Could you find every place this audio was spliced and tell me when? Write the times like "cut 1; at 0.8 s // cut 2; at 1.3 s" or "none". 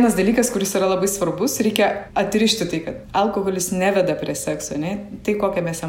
cut 1; at 2.0 s // cut 2; at 3.0 s